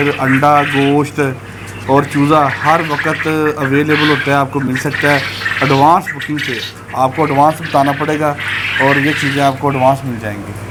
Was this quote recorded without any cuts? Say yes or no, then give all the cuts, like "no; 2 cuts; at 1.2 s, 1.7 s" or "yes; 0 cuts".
yes; 0 cuts